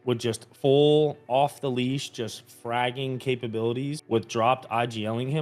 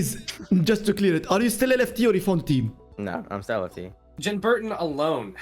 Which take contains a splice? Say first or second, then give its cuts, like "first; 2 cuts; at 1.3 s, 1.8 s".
second; 2 cuts; at 2.8 s, 4.2 s